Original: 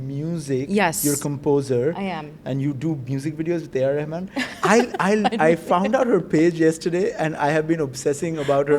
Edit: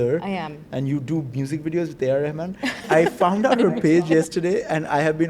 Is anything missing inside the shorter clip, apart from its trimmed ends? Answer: yes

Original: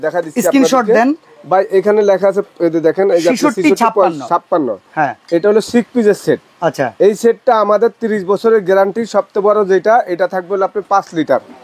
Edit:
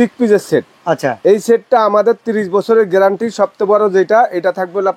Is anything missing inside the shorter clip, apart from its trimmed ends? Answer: no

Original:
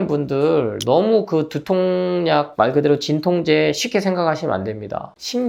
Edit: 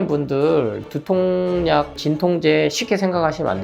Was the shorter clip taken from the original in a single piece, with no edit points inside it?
no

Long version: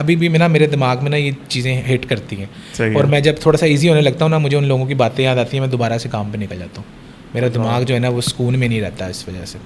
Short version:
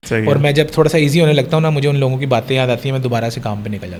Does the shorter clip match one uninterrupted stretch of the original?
yes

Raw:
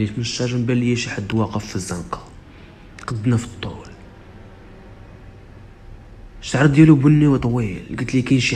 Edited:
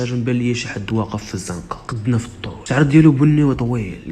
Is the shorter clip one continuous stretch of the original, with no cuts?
no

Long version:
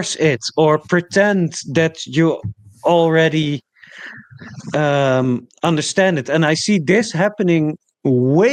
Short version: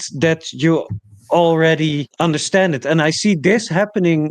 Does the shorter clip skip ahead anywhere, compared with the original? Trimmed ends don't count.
yes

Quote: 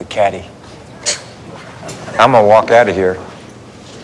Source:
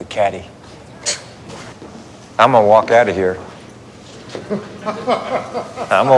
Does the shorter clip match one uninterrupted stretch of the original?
no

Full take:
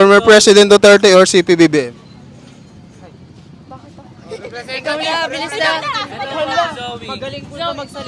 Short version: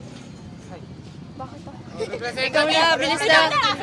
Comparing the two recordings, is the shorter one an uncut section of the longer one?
yes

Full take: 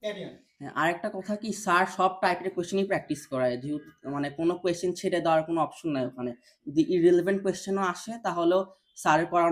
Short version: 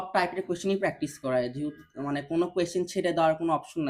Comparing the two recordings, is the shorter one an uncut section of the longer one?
yes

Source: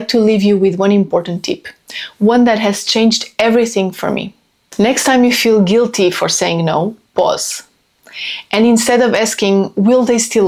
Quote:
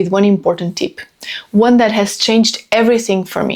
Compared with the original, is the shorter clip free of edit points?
yes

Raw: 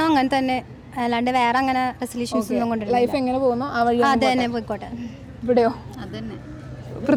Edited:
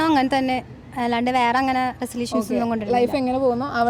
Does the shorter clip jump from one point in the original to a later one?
no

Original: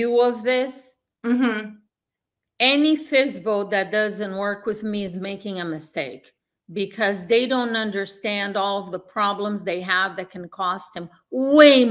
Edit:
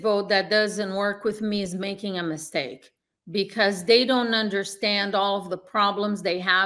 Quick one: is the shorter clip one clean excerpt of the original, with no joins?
yes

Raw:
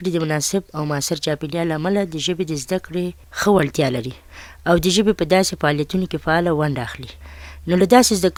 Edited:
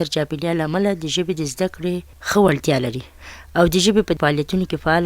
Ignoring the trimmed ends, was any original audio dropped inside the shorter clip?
yes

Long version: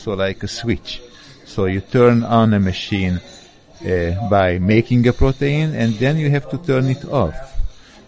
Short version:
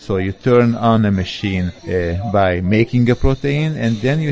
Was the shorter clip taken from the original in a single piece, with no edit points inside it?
no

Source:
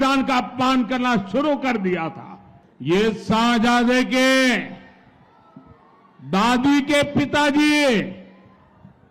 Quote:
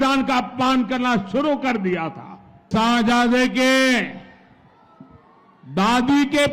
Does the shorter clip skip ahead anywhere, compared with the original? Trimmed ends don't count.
yes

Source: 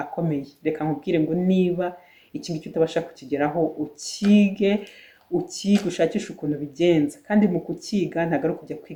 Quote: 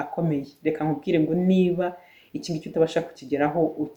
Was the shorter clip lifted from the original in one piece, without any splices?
yes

